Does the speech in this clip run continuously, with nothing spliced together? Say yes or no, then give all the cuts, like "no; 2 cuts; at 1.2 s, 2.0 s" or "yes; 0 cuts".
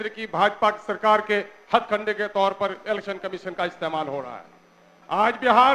yes; 0 cuts